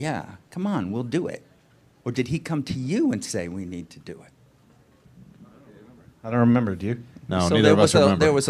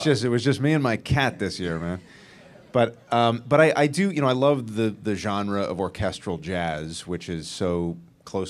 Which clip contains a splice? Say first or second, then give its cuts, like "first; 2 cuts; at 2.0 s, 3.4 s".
second; 1 cut; at 5.0 s